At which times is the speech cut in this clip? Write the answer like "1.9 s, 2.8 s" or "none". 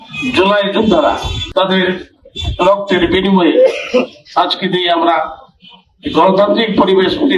1.4 s

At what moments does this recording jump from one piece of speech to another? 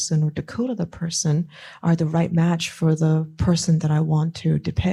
none

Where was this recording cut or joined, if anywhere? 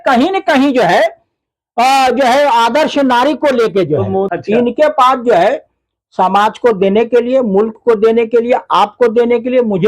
4.3 s

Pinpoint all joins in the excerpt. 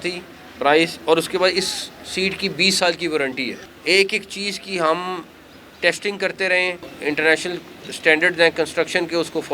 3.7 s, 6.9 s

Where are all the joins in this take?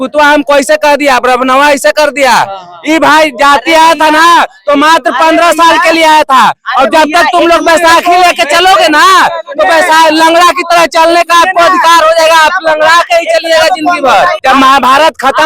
14.4 s

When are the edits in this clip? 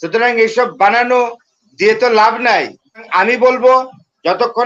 3.0 s

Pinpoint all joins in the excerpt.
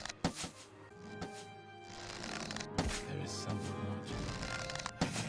0.9 s

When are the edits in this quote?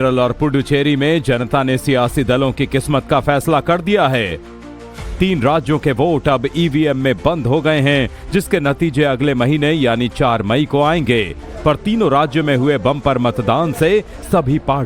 3.0 s

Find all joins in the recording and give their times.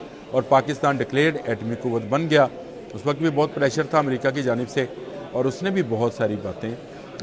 none

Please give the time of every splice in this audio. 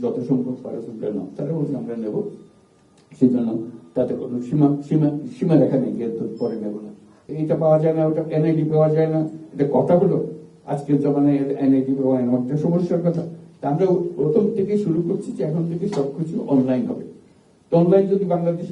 7.3 s

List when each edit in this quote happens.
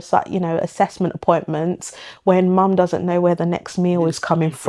none

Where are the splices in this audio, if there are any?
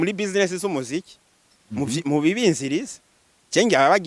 none

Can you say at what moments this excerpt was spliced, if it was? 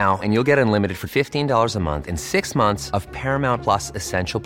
none

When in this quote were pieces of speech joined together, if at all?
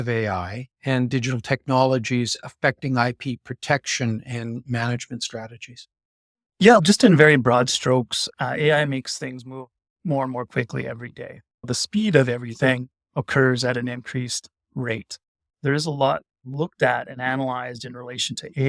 15.5 s

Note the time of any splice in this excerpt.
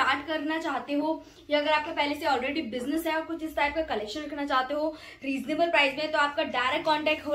none

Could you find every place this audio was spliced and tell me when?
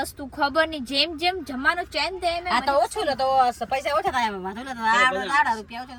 none

